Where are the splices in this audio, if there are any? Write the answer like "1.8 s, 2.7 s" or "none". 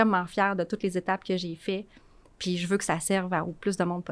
none